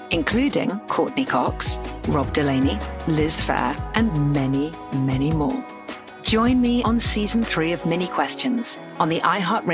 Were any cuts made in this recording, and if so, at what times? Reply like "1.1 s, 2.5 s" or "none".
none